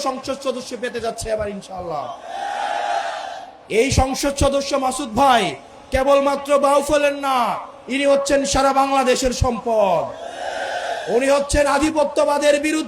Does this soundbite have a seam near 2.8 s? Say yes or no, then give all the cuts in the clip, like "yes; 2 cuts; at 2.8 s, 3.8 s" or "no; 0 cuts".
no; 0 cuts